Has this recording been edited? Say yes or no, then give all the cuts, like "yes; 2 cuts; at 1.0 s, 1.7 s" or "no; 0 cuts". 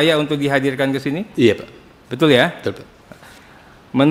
no; 0 cuts